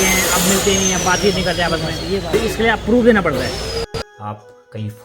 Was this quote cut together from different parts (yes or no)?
yes